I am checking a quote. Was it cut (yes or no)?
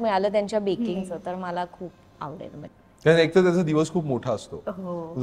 yes